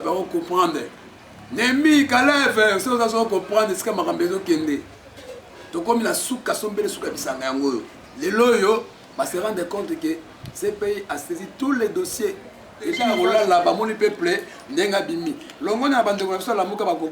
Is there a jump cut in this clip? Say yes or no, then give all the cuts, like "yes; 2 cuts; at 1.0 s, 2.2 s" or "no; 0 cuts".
yes; 1 cut; at 13.0 s